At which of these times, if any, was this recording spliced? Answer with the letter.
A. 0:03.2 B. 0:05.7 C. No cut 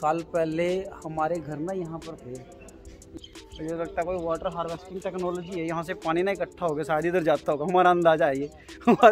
A